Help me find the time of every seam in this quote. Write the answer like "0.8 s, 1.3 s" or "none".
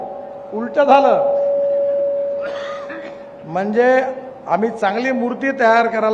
none